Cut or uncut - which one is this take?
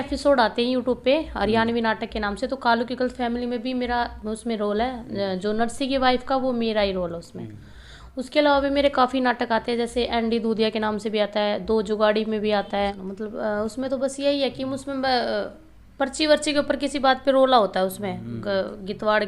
cut